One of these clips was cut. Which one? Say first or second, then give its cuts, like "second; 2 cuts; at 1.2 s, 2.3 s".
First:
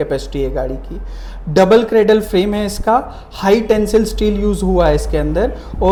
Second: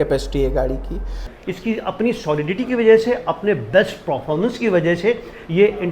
second; 1 cut; at 1.3 s